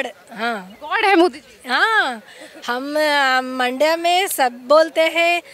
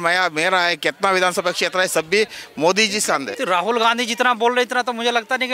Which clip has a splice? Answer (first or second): second